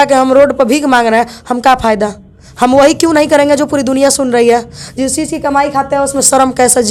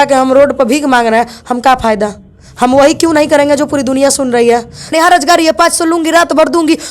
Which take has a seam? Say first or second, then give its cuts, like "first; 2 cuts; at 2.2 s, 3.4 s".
second; 1 cut; at 4.9 s